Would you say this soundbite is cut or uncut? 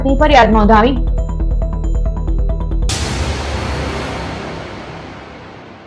cut